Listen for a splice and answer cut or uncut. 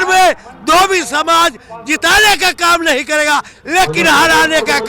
uncut